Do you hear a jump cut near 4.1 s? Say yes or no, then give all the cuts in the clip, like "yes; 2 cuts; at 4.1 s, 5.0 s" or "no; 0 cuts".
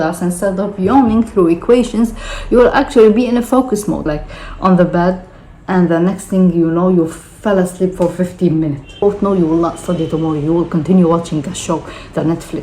yes; 2 cuts; at 4.1 s, 9.0 s